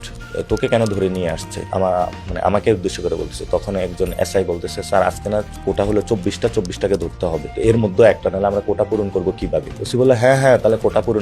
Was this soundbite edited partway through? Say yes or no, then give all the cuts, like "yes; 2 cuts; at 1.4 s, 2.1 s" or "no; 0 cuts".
yes; 3 cuts; at 1.6 s, 7.5 s, 9.8 s